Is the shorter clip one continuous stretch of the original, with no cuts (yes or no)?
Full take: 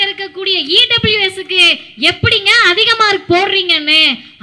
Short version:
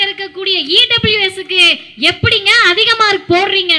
yes